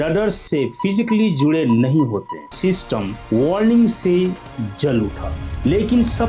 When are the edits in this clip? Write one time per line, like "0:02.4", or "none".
0:02.4